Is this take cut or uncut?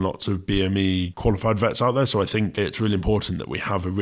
cut